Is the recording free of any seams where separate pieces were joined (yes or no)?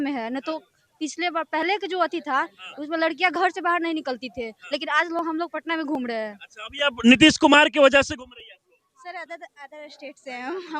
yes